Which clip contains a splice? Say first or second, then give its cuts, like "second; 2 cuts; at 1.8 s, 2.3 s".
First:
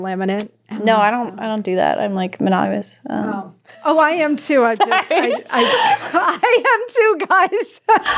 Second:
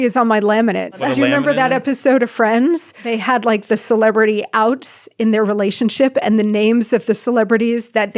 second; 2 cuts; at 1.0 s, 3.1 s